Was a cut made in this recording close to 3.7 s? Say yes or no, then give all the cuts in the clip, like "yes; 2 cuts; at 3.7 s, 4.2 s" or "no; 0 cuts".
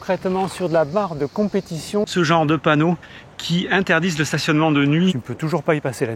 no; 2 cuts; at 2.1 s, 5.1 s